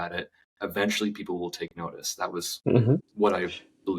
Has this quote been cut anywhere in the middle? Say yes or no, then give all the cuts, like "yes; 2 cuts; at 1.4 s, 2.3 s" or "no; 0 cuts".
yes; 1 cut; at 3.1 s